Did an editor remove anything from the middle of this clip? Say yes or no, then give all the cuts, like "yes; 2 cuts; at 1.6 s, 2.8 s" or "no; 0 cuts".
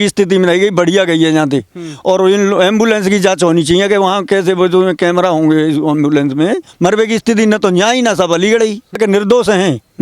yes; 2 cuts; at 6.7 s, 9.0 s